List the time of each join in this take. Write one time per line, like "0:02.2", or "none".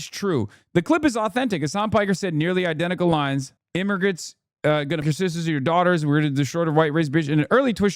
0:05.0